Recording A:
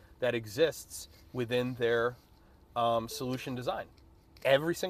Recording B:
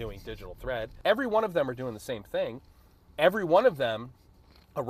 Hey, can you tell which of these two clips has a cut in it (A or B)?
B